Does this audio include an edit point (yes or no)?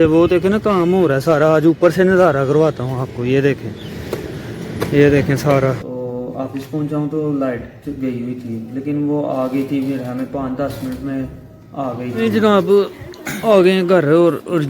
yes